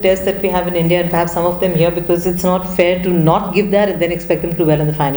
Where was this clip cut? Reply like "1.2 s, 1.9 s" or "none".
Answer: none